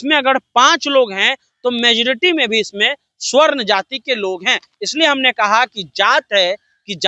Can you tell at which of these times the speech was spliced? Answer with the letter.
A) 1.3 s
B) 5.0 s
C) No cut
C